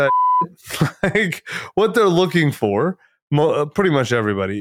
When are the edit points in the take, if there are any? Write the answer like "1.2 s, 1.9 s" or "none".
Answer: none